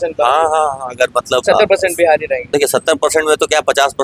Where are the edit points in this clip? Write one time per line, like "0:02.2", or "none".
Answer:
0:01.4
0:02.4